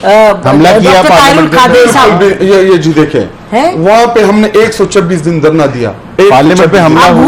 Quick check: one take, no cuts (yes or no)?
yes